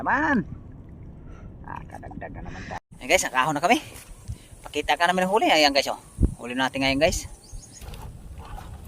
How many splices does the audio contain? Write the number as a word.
two